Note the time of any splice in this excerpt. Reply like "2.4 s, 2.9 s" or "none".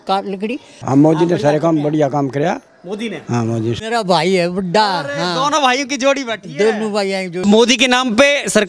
0.8 s, 3.8 s, 7.4 s